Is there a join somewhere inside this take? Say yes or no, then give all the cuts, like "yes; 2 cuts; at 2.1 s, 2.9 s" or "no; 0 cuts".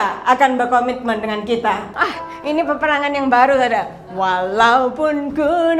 yes; 1 cut; at 1.8 s